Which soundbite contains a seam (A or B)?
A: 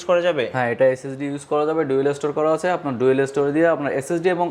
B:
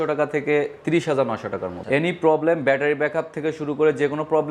B